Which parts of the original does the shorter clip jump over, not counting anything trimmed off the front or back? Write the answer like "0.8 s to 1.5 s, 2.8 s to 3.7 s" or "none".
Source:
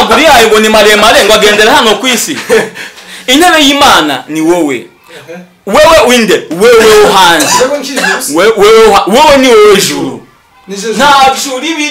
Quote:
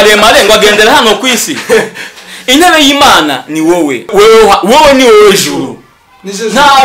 4.9 s to 8.6 s